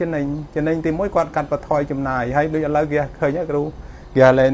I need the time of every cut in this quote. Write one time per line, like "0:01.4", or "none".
none